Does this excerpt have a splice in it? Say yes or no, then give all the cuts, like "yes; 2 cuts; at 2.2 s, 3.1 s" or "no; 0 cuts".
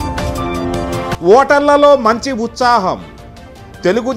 yes; 1 cut; at 1.1 s